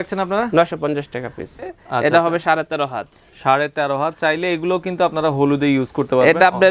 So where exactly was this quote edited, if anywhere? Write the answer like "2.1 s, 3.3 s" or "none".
1.7 s